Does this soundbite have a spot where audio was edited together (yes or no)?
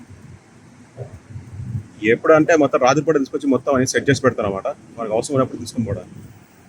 no